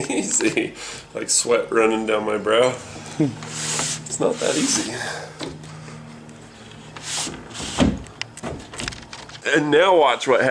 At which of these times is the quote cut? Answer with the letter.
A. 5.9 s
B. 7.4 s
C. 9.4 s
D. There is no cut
C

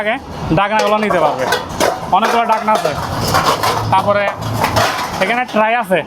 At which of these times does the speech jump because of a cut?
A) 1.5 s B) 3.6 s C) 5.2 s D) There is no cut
D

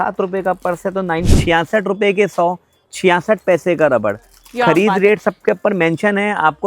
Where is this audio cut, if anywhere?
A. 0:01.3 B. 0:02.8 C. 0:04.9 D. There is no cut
A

